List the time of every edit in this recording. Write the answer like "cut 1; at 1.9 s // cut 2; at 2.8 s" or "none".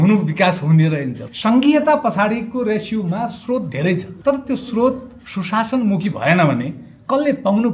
cut 1; at 1.2 s // cut 2; at 4.1 s